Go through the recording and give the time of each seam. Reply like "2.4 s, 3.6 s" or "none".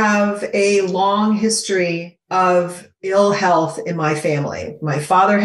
2.1 s, 3.1 s